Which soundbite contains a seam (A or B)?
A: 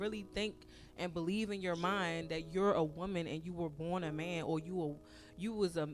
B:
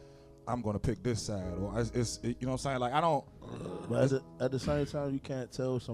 A